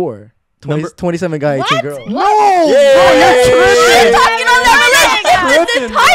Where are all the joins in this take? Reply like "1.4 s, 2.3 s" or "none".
none